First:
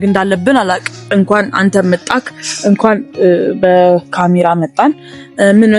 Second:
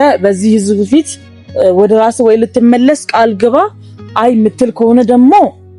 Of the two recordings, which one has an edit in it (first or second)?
first